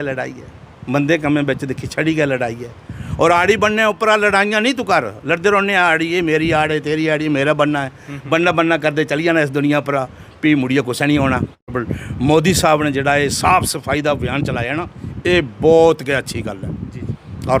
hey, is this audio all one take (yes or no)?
no